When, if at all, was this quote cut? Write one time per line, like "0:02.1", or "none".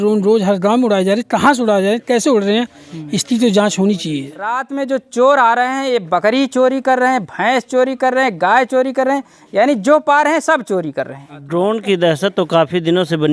0:04.7
0:11.4